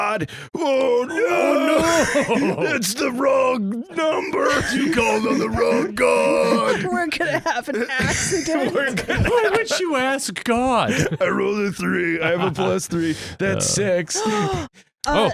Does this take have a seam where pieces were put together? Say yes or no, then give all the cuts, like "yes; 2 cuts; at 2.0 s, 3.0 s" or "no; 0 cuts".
no; 0 cuts